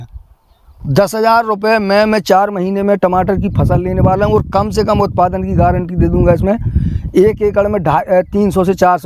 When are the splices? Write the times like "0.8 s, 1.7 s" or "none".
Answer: none